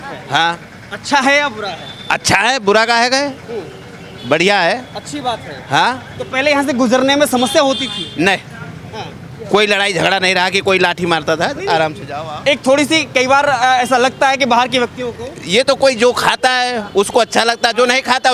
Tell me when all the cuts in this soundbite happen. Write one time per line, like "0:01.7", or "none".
none